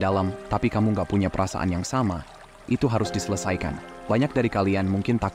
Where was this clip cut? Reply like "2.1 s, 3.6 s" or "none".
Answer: 3.9 s